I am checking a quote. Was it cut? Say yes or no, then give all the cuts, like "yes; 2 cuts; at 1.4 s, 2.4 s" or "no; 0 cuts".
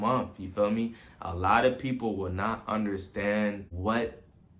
yes; 1 cut; at 3.7 s